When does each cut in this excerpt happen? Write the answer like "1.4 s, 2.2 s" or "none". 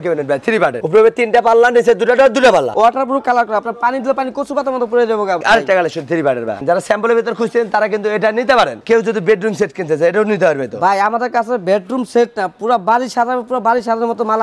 0.8 s, 2.7 s, 5.4 s, 6.6 s, 8.8 s